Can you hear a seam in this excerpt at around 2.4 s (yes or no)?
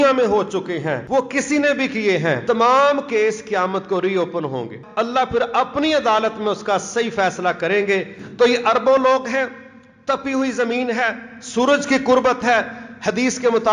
yes